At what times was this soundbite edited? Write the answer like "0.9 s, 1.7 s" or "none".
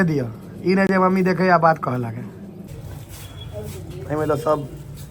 2.7 s